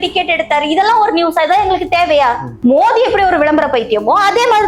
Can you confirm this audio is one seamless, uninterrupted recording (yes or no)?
no